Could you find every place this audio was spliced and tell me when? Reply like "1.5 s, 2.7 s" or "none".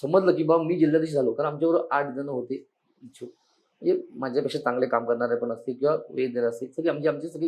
none

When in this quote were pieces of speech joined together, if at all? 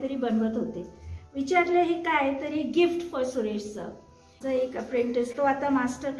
4.4 s

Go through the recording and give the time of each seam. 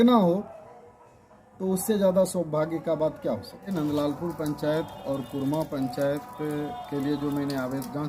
3.7 s

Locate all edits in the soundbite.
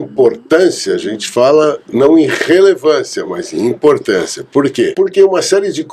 4.9 s

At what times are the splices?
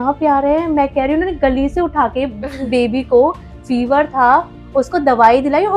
none

